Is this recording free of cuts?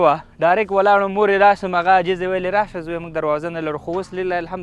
yes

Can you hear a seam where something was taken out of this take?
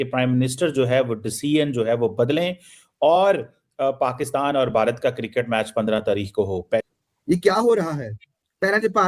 yes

